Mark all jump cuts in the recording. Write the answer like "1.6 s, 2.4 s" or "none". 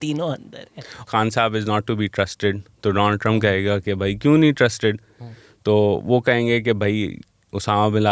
1.0 s